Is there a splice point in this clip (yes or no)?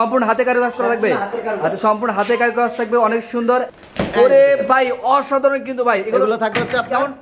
yes